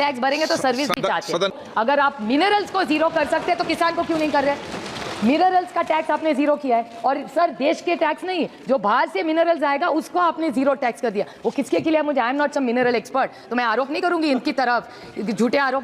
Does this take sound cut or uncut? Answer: cut